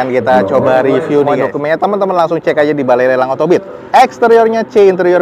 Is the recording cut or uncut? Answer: cut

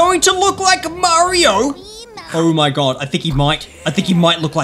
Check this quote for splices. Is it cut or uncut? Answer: uncut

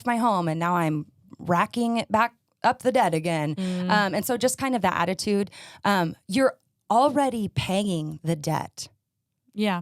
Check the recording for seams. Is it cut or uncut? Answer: uncut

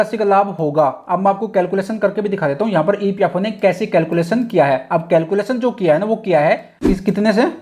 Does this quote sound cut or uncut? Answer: cut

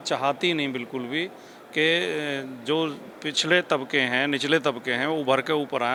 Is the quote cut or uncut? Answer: uncut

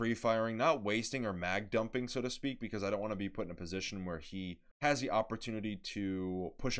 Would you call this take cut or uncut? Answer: cut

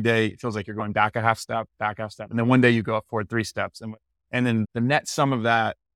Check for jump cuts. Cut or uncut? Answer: cut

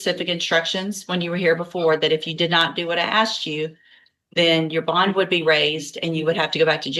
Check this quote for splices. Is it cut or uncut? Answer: uncut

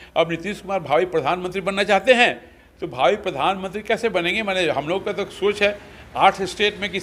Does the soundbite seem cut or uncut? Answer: uncut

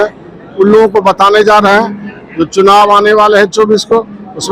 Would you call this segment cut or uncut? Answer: uncut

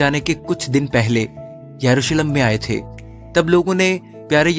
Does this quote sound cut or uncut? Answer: uncut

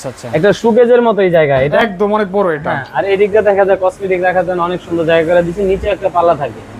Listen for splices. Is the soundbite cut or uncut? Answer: uncut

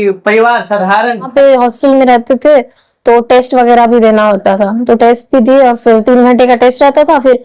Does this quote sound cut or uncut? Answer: cut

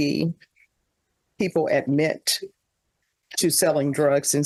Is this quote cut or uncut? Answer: uncut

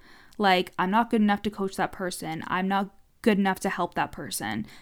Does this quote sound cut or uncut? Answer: cut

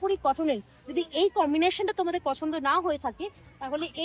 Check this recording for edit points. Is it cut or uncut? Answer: uncut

